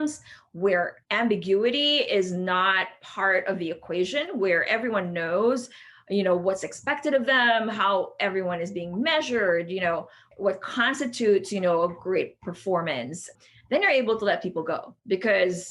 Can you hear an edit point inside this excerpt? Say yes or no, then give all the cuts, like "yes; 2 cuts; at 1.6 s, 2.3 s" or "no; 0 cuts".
yes; 3 cuts; at 1.0 s, 10.3 s, 13.3 s